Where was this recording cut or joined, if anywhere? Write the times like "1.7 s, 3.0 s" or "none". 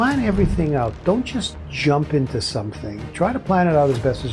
1.6 s